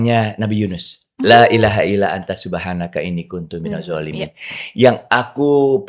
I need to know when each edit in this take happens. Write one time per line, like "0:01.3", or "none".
none